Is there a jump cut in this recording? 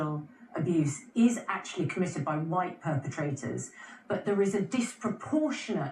no; 0 cuts

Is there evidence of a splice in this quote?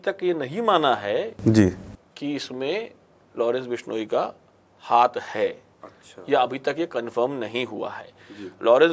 no; 0 cuts

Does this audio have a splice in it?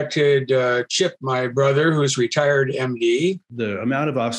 yes; 1 cut; at 3.4 s

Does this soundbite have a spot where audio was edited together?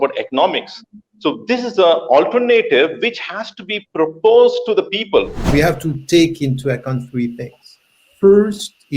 yes; 1 cut; at 5.4 s

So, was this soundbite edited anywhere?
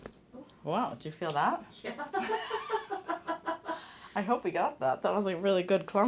no; 0 cuts

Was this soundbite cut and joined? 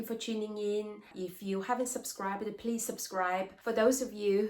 yes; 2 cuts; at 1.1 s, 3.5 s

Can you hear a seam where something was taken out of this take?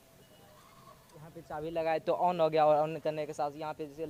no; 0 cuts

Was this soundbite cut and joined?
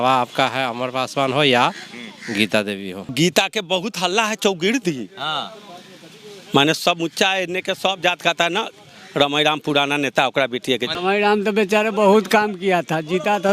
yes; 2 cuts; at 3.1 s, 10.9 s

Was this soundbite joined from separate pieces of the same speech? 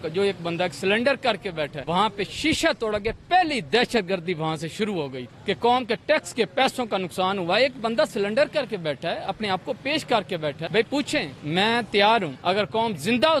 yes; 5 cuts; at 1.8 s, 5.3 s, 10.6 s, 11.4 s, 12.3 s

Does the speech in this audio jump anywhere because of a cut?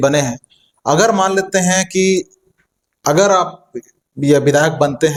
no; 0 cuts

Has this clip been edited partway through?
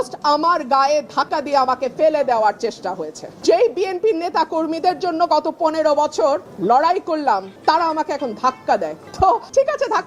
no; 0 cuts

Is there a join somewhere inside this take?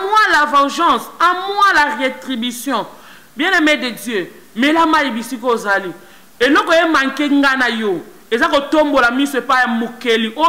no; 0 cuts

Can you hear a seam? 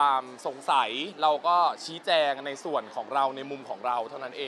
no; 0 cuts

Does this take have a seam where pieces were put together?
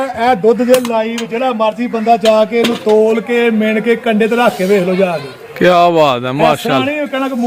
no; 0 cuts

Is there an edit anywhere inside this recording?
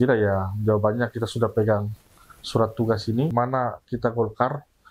yes; 1 cut; at 3.3 s

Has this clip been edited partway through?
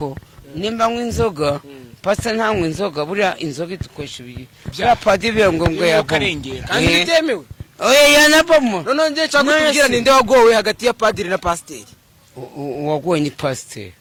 no; 0 cuts

